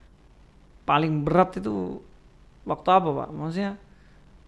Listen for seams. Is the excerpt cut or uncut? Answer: uncut